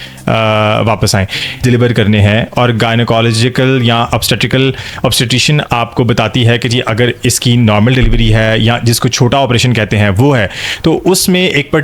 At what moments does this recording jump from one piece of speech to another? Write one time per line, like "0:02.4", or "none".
0:01.6